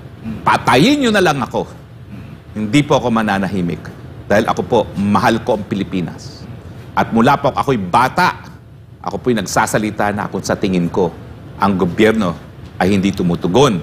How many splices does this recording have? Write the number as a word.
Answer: zero